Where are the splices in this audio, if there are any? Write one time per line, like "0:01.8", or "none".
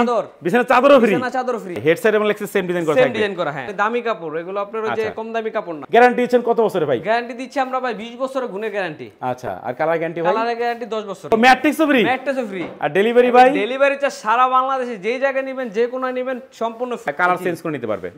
0:01.8
0:03.7
0:05.8
0:11.3
0:17.1